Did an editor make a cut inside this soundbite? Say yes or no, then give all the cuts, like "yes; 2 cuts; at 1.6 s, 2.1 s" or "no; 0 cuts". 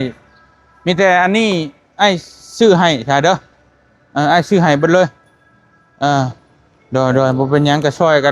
no; 0 cuts